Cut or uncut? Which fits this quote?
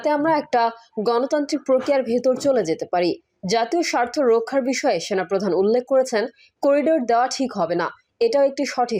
uncut